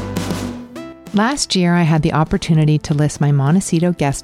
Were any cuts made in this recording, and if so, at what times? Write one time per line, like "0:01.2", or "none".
0:01.0